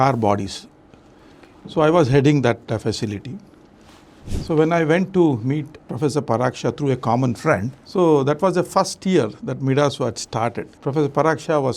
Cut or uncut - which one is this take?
cut